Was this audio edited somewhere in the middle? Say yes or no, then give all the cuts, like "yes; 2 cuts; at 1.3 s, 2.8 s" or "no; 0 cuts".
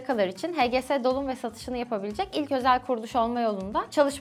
no; 0 cuts